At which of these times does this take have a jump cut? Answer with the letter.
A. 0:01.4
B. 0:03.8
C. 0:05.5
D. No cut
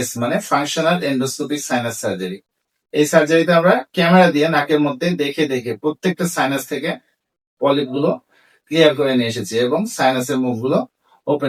D